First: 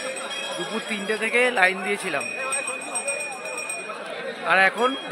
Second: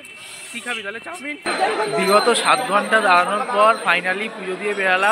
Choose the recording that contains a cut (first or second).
second